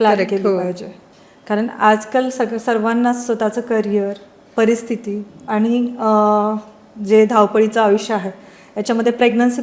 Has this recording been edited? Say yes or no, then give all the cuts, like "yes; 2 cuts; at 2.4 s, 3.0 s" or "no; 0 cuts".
no; 0 cuts